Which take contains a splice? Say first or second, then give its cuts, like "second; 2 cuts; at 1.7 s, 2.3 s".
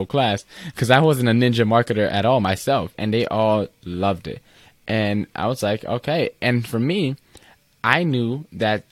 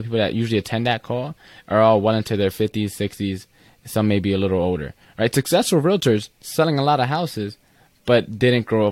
first; 1 cut; at 2.9 s